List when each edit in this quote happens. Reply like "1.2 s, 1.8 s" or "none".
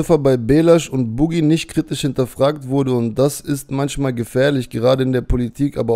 none